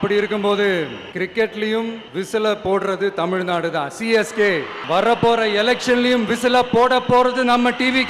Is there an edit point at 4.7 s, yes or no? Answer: yes